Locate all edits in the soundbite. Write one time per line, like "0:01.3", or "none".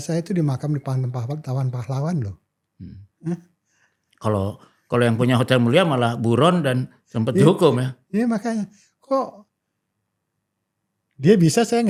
none